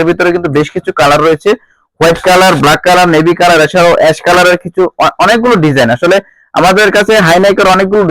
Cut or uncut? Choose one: uncut